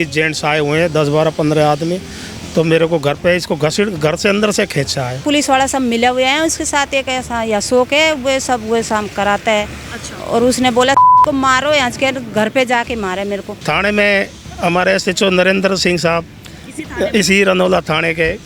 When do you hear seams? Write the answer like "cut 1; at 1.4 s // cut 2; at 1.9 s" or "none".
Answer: cut 1; at 5.2 s // cut 2; at 13.5 s